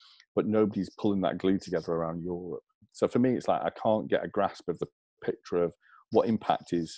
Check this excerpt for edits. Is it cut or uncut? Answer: cut